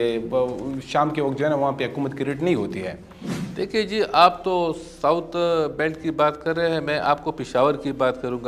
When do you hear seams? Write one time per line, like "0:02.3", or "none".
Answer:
none